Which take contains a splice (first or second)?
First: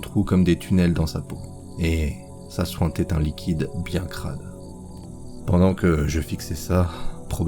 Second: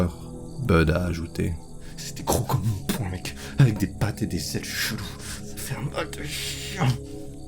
first